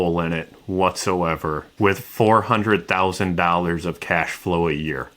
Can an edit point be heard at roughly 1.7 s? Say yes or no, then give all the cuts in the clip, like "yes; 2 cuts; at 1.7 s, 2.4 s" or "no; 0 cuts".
yes; 1 cut; at 1.7 s